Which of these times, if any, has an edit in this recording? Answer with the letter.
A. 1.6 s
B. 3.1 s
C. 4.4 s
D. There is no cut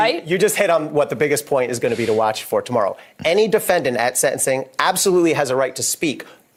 D